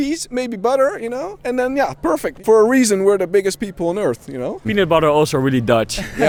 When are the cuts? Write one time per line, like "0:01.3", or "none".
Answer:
none